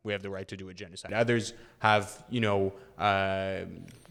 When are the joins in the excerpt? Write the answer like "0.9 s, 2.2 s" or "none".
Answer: none

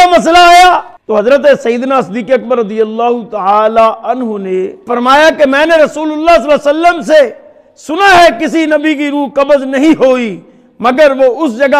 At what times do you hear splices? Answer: 0.9 s, 4.9 s

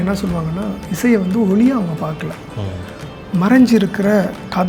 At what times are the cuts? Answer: none

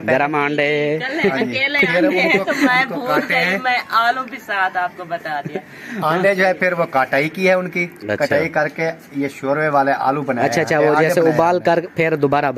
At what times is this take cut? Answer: none

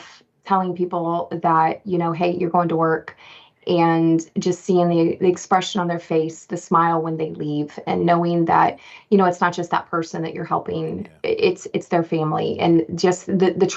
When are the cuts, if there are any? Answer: none

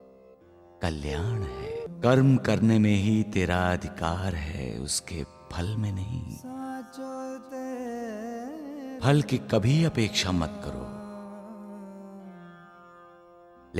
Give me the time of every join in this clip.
1.9 s

